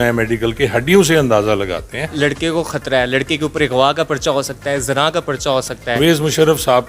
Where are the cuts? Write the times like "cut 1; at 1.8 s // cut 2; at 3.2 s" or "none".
cut 1; at 2.1 s // cut 2; at 6.0 s